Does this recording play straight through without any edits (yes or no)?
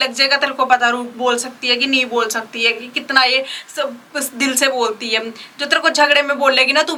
yes